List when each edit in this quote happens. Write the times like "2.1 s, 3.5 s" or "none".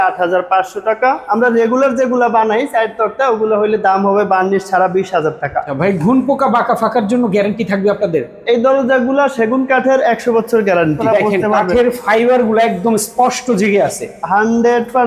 1.2 s, 5.7 s, 11.0 s